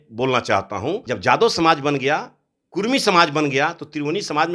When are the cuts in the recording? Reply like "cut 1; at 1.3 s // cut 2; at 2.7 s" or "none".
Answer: cut 1; at 1.0 s